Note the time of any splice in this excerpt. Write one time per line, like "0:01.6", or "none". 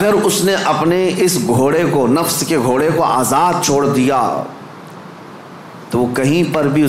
none